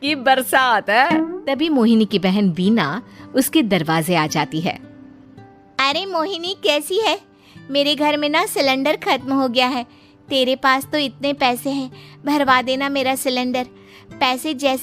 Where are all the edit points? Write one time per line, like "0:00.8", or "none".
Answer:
0:01.4